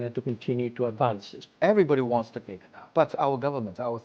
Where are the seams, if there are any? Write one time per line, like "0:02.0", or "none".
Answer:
0:01.4
0:02.8